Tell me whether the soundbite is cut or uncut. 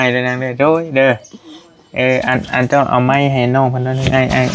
uncut